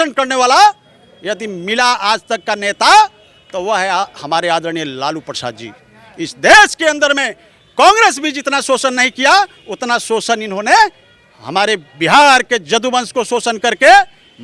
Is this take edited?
no; 0 cuts

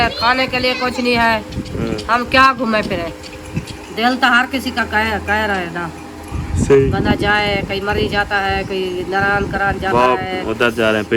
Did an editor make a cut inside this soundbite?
yes; 1 cut; at 1.6 s

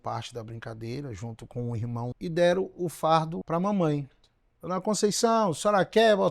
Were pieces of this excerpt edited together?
yes; 2 cuts; at 2.1 s, 3.4 s

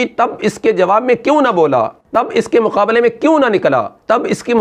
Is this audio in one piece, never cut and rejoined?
no; 1 cut; at 2.0 s

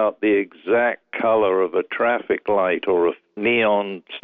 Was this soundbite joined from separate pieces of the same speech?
yes; 1 cut; at 3.3 s

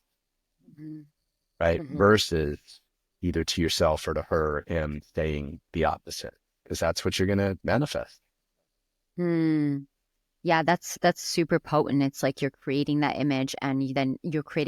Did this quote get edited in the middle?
no; 0 cuts

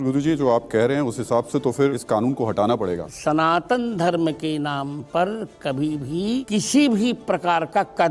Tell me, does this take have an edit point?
yes; 3 cuts; at 2.0 s, 3.1 s, 6.5 s

